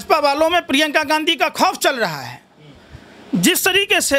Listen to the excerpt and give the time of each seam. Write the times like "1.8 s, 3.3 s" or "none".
none